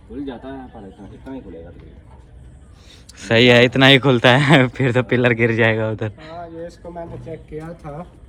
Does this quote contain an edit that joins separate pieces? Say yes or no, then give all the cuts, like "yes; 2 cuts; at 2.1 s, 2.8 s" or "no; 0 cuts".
no; 0 cuts